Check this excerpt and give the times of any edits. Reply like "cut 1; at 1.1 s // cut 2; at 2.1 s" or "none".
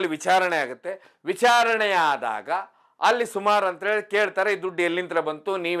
none